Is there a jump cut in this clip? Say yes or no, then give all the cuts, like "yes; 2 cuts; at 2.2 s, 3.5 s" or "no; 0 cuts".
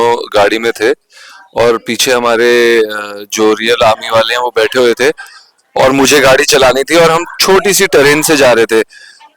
no; 0 cuts